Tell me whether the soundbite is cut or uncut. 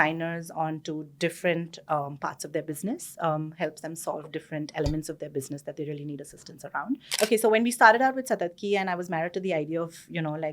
cut